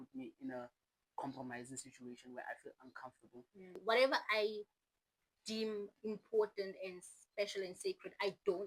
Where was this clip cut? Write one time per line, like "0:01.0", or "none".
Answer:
0:03.8

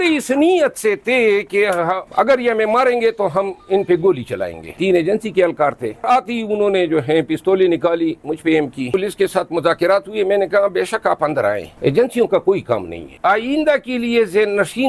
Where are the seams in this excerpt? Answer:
0:04.8
0:06.0
0:08.9
0:13.1

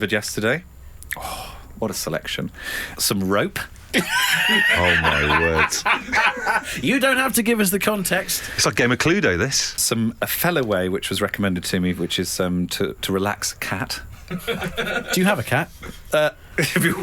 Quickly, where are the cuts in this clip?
none

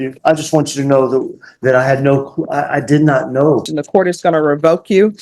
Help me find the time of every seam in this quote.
0:03.6

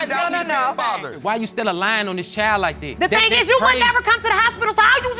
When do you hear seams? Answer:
0:01.2

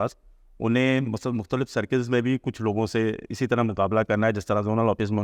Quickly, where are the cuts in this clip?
none

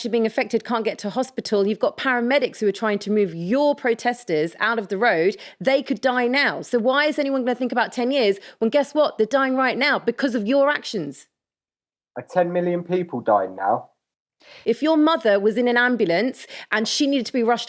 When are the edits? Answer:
0:14.4

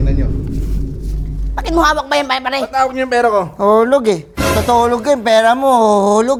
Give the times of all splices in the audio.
none

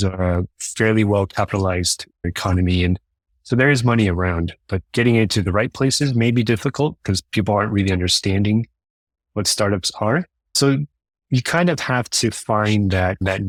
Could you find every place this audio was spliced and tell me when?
none

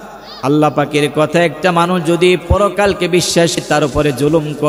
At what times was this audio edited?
0:03.6

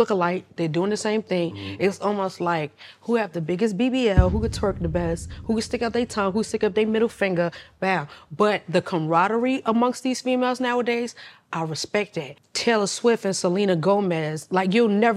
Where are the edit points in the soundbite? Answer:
0:12.4

